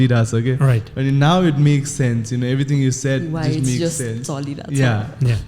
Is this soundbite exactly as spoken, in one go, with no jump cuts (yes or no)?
yes